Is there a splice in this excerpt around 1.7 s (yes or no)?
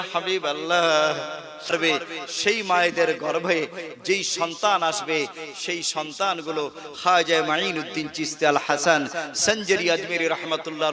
yes